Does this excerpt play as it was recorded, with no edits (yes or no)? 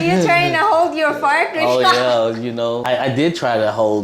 no